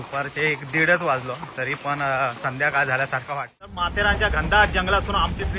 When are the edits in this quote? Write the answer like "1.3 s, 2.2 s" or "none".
3.9 s